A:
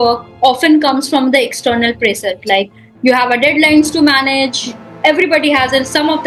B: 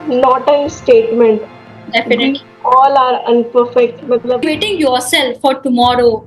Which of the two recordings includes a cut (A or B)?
B